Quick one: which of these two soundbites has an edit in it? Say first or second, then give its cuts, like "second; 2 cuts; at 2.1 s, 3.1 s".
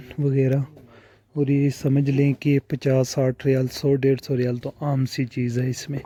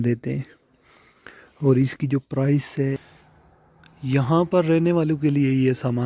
second; 1 cut; at 3.1 s